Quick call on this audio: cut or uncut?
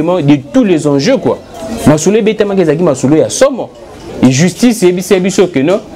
cut